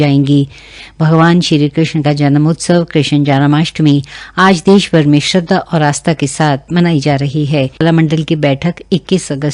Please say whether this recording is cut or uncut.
cut